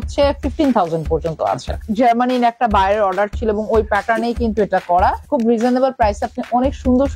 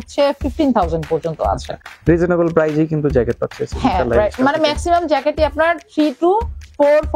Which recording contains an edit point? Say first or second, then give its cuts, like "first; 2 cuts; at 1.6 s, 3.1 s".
first; 2 cuts; at 1.8 s, 5.2 s